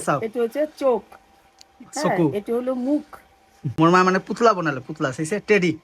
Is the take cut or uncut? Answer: cut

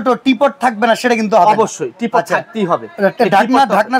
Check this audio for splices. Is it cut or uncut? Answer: uncut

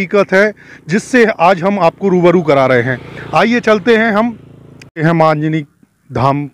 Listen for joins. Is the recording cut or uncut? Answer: uncut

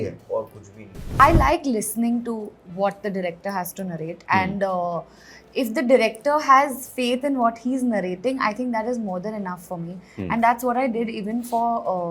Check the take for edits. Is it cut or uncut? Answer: cut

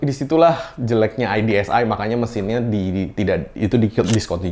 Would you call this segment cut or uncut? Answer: uncut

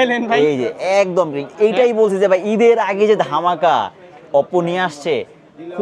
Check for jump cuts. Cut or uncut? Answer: uncut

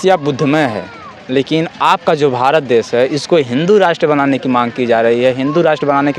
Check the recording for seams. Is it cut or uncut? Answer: uncut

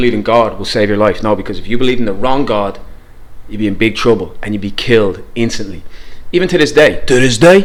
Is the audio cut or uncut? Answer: uncut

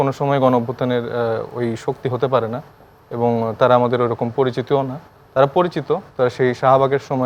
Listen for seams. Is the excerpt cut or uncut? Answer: uncut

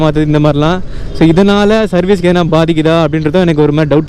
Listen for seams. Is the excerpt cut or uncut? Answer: uncut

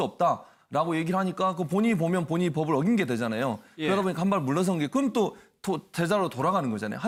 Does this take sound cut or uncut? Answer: uncut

